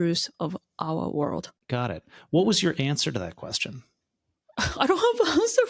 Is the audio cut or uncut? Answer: cut